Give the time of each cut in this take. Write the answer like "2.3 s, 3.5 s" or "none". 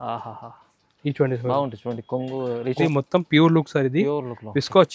2.8 s